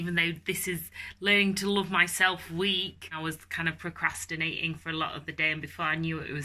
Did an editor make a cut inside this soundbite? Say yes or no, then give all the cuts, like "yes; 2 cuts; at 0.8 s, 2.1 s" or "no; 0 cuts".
yes; 1 cut; at 3.2 s